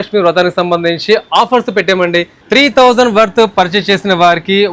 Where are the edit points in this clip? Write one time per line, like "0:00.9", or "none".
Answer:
0:02.4